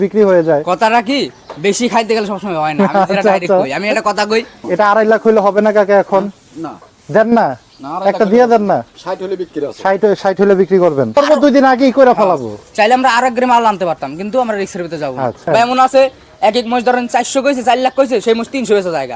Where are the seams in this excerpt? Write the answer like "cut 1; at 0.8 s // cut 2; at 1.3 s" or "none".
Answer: cut 1; at 4.6 s // cut 2; at 11.2 s // cut 3; at 15.5 s